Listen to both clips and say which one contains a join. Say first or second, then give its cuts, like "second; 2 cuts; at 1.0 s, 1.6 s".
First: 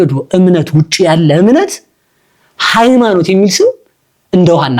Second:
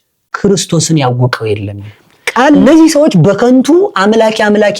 second; 1 cut; at 2.6 s